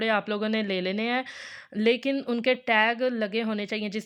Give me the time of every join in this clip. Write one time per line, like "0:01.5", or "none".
none